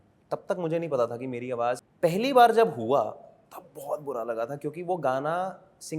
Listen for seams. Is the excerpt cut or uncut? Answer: cut